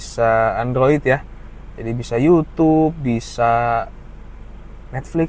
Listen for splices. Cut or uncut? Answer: uncut